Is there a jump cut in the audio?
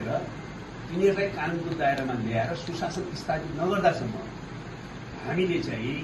no; 0 cuts

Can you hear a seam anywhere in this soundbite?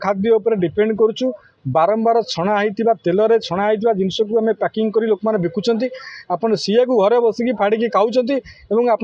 no; 0 cuts

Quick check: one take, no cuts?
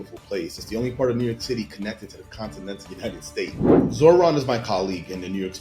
no; 1 cut; at 3.6 s

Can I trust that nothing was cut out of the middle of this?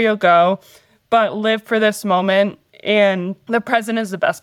no; 1 cut; at 3.4 s

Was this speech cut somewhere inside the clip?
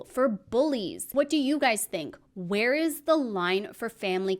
yes; 1 cut; at 1.1 s

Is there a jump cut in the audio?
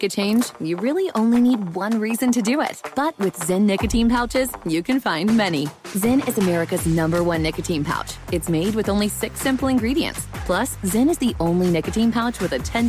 no; 0 cuts

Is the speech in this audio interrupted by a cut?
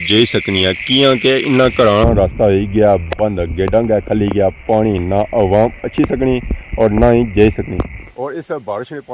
yes; 1 cut; at 7.9 s

